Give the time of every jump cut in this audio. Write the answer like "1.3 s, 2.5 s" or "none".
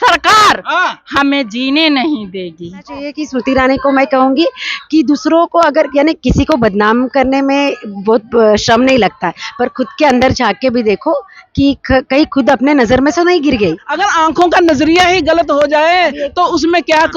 3.2 s, 13.9 s